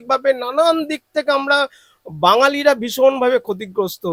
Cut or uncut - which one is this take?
uncut